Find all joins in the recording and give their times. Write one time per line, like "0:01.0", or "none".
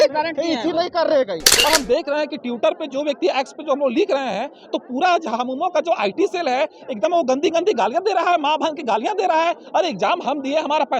0:01.5